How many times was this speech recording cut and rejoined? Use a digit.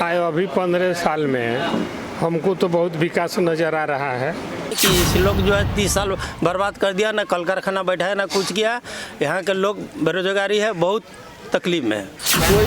1